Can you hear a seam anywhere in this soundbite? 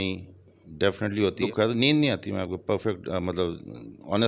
yes; 1 cut; at 1.4 s

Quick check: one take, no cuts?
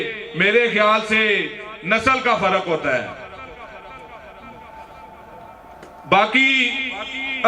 yes; 0 cuts

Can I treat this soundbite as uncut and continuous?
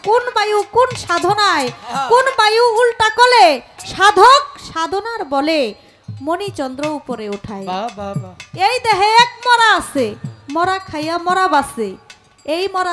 yes; 0 cuts

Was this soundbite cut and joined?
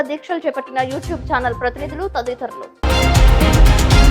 yes; 1 cut; at 2.7 s

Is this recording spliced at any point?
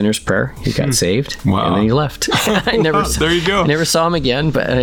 no; 0 cuts

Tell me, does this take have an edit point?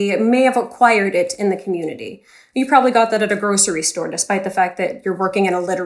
no; 0 cuts

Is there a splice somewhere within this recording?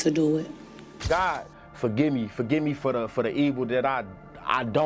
yes; 1 cut; at 1.0 s

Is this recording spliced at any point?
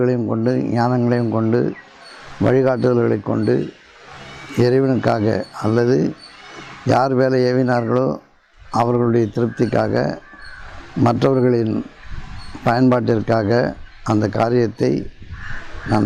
no; 0 cuts

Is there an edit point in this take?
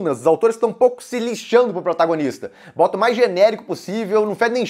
no; 0 cuts

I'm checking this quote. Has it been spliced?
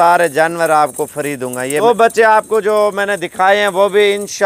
yes; 1 cut; at 1.8 s

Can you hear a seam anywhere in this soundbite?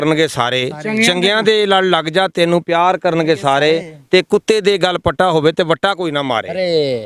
no; 0 cuts

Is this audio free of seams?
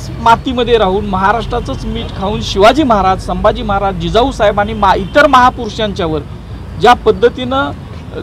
yes; 0 cuts

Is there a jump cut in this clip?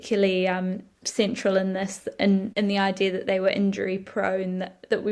yes; 1 cut; at 2.5 s

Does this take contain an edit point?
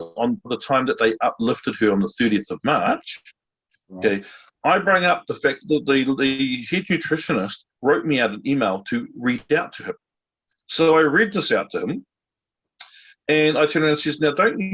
no; 0 cuts

